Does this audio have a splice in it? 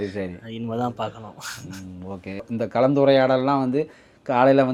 no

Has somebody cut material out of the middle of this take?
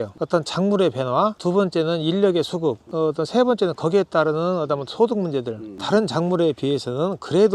yes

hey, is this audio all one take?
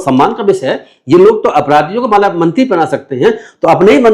yes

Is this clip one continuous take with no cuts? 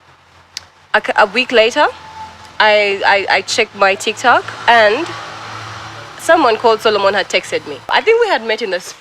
no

